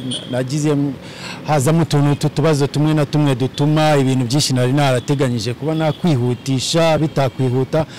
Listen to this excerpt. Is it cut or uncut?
uncut